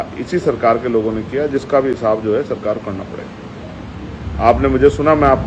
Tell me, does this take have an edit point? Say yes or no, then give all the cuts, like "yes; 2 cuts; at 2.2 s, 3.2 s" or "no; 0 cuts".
no; 0 cuts